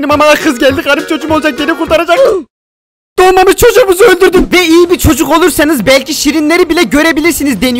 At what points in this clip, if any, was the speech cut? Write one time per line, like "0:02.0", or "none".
0:04.4